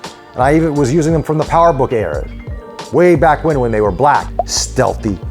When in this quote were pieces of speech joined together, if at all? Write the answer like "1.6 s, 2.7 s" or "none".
4.3 s